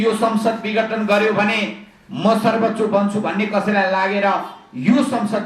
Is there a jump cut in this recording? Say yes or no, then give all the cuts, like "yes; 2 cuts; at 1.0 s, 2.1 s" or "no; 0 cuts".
no; 0 cuts